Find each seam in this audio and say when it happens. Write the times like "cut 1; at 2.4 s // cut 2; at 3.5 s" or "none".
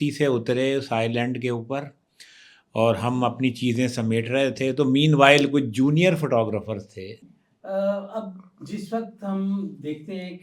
cut 1; at 7.2 s